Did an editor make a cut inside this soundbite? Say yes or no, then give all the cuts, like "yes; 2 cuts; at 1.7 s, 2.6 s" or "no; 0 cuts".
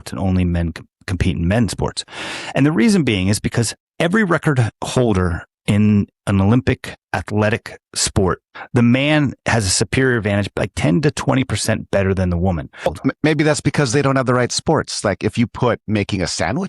yes; 1 cut; at 12.9 s